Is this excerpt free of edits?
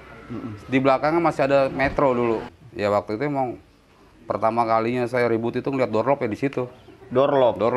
no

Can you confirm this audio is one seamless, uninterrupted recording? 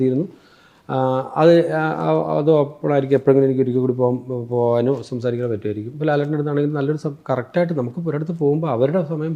yes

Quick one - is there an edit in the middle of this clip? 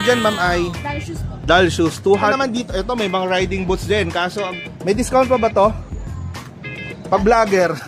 yes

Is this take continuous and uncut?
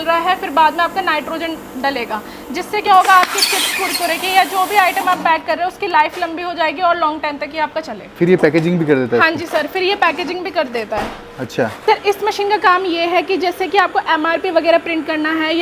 no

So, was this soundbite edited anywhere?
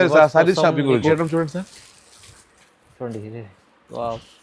yes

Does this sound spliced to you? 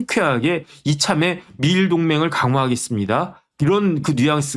no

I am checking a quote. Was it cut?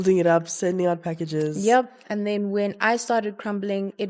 no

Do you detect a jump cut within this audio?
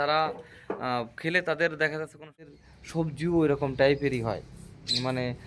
yes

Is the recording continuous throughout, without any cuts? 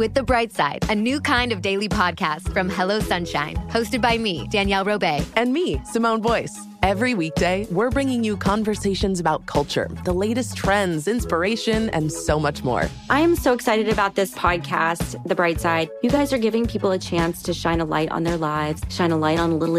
yes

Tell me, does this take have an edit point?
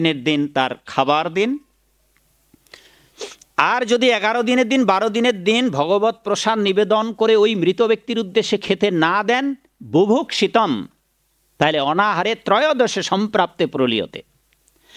no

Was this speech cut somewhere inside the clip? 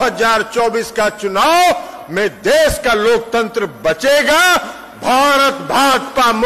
no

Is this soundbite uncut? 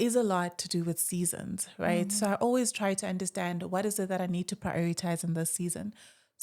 yes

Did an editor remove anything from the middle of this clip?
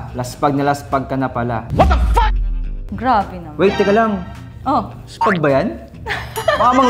no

